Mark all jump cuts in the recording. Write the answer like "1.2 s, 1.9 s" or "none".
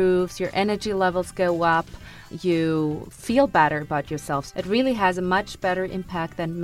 2.2 s, 3.1 s, 4.5 s